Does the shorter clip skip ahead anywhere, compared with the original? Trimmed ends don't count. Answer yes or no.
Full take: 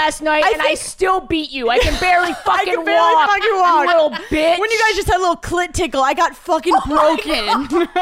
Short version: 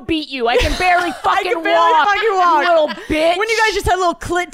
no